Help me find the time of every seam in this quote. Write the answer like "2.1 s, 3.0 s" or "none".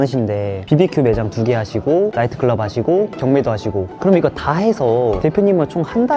3.2 s